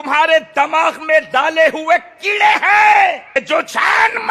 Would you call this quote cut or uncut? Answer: cut